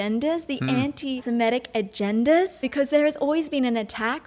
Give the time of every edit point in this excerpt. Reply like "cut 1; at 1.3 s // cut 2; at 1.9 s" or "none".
cut 1; at 1.2 s // cut 2; at 2.7 s